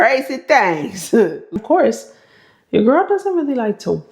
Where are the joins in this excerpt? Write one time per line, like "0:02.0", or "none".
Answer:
0:01.4